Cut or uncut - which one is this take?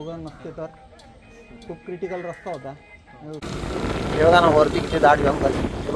cut